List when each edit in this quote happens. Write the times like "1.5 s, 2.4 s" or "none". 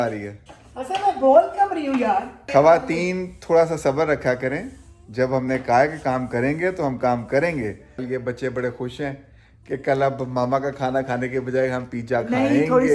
2.4 s, 8.0 s

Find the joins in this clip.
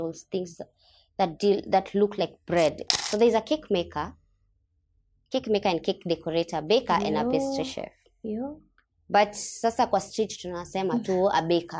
2.9 s

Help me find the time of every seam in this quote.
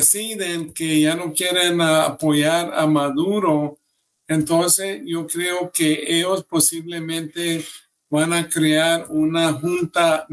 none

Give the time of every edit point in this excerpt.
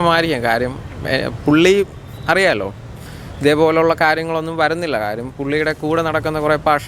none

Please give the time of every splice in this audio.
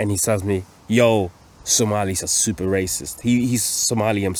none

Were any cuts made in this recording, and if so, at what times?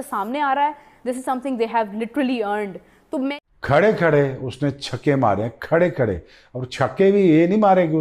3.4 s

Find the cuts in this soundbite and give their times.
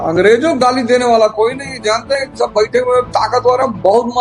none

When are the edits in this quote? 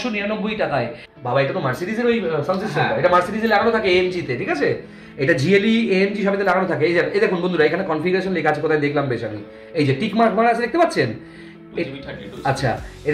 1.0 s

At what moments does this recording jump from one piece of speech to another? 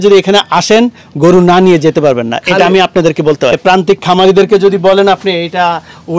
3.6 s

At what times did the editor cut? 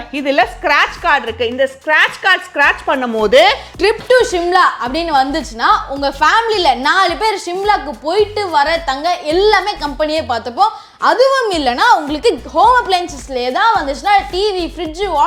none

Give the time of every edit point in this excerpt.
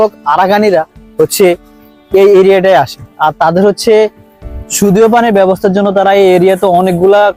none

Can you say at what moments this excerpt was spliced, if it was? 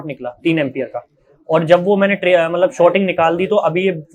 none

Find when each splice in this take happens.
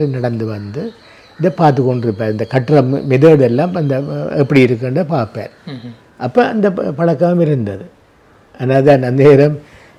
none

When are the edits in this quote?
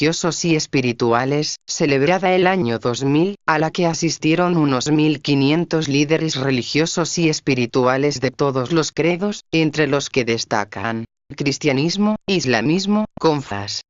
none

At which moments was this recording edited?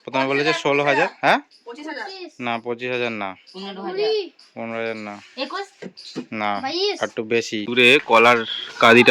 7.7 s

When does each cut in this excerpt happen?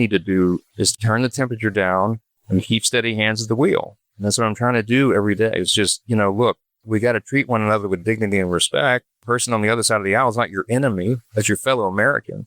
0.9 s

